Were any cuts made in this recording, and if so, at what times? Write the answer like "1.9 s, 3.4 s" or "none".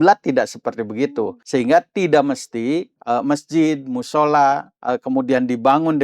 1.4 s, 2.9 s, 4.7 s